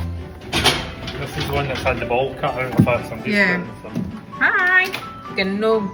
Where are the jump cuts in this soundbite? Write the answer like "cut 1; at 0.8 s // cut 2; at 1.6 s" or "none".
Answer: none